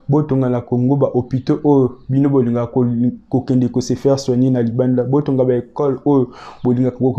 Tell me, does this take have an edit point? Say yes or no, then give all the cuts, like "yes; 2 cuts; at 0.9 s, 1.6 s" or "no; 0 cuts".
no; 0 cuts